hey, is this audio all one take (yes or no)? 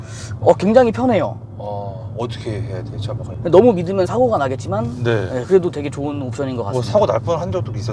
no